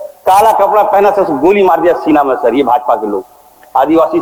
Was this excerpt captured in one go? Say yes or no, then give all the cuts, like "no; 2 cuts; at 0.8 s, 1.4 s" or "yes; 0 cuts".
yes; 0 cuts